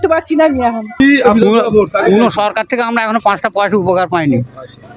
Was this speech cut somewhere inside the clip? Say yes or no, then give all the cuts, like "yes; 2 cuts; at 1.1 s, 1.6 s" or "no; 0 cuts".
yes; 1 cut; at 1.2 s